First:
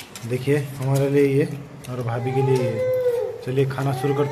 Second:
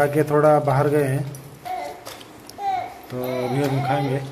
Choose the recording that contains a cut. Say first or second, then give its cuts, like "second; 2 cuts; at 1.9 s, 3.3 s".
second; 1 cut; at 1.6 s